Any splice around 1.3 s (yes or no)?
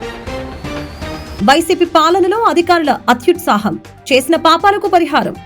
yes